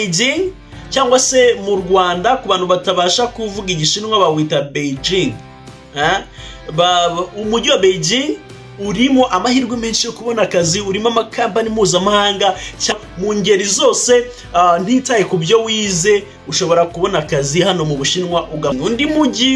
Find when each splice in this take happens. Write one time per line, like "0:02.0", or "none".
0:12.9
0:18.8